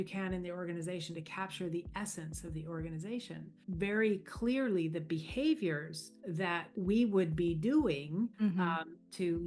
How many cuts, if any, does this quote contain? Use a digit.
3